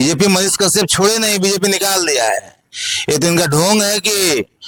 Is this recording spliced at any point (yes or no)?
no